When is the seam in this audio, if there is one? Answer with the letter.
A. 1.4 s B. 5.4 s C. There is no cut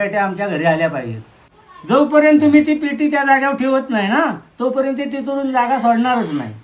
A